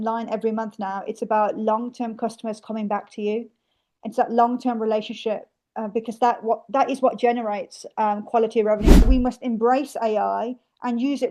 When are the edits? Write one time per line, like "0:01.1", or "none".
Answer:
0:09.1